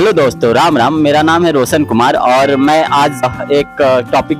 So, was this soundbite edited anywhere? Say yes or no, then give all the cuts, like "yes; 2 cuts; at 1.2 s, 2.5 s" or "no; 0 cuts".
no; 0 cuts